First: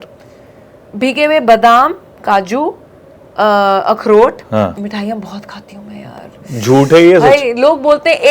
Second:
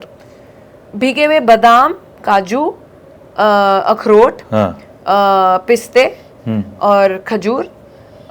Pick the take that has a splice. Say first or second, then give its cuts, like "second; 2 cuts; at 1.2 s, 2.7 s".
first; 1 cut; at 4.8 s